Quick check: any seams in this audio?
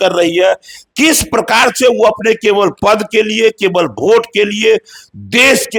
no; 0 cuts

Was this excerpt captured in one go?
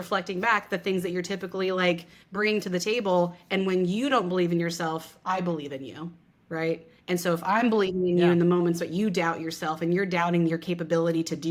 yes; 0 cuts

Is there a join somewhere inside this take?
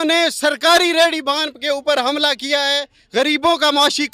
no; 0 cuts

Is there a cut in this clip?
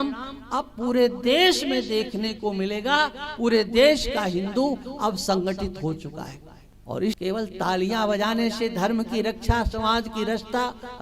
yes; 1 cut; at 7.2 s

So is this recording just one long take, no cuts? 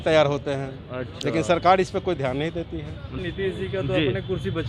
no; 1 cut; at 3.2 s

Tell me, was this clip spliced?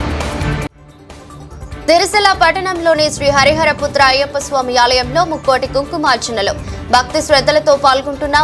no; 0 cuts

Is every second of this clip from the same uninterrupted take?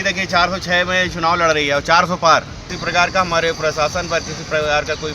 no; 1 cut; at 2.6 s

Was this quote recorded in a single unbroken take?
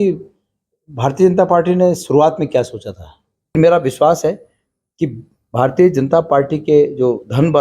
no; 1 cut; at 3.6 s

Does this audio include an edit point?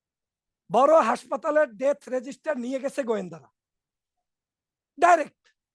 no; 0 cuts

